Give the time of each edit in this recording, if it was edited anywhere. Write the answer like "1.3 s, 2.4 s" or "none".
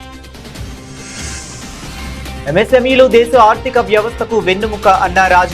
1.7 s